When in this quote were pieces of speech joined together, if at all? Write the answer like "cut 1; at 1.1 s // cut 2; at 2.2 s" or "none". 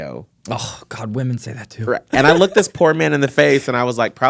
none

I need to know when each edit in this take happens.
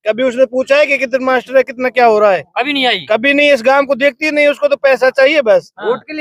none

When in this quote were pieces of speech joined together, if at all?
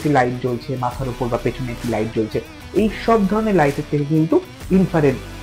none

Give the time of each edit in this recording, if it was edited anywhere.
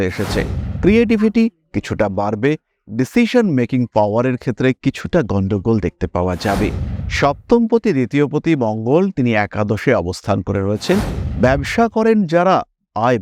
none

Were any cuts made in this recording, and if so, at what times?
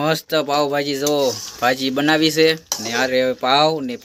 none

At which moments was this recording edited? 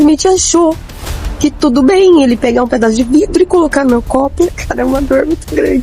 cut 1; at 4.6 s

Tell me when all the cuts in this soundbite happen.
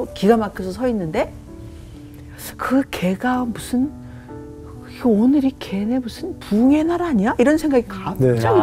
none

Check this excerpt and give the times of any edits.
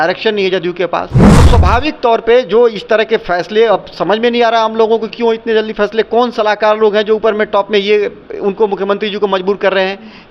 cut 1; at 1.5 s

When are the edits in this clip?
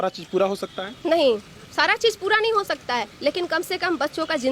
none

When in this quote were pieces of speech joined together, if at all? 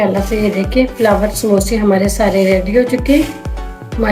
none

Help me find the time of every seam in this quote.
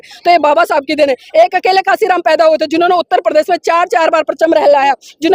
none

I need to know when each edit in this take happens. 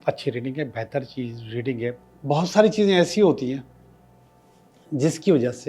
cut 1; at 2.1 s

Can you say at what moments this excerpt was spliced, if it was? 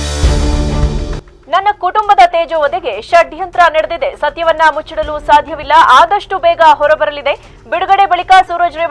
cut 1; at 1.2 s

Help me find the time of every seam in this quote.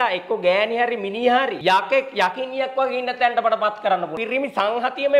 cut 1; at 1.6 s // cut 2; at 4.1 s

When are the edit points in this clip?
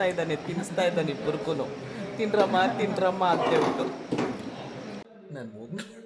cut 1; at 5.0 s

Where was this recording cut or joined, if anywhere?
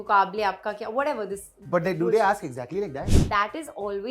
cut 1; at 3.2 s

